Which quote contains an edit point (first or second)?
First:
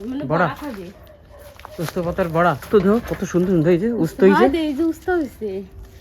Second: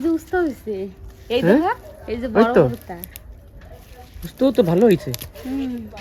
first